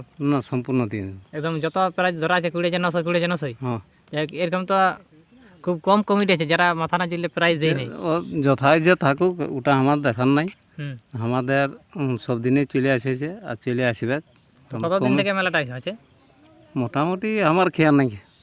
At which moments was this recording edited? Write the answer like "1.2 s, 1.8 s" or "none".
none